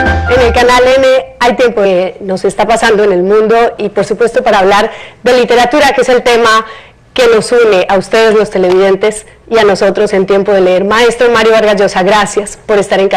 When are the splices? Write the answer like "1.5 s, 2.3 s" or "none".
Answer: none